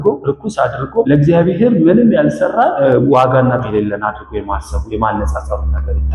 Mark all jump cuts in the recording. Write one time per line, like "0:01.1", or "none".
0:00.7
0:02.7
0:03.7